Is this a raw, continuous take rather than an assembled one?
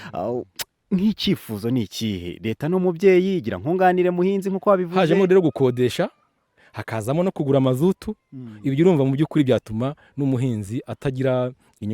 no; 1 cut; at 4.9 s

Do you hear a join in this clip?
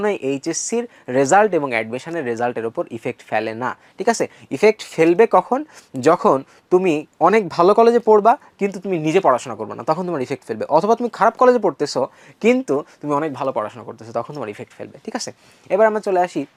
no; 0 cuts

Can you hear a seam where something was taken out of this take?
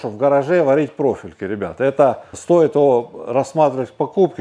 no; 0 cuts

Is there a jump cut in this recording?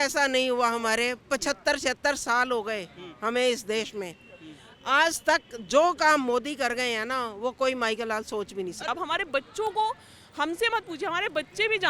yes; 1 cut; at 8.8 s

